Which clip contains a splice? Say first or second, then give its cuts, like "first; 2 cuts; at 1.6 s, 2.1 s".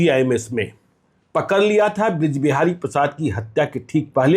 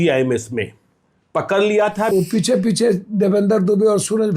second; 1 cut; at 2.1 s